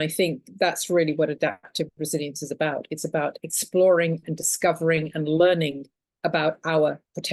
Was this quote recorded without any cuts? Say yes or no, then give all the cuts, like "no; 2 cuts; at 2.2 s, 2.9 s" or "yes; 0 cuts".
yes; 0 cuts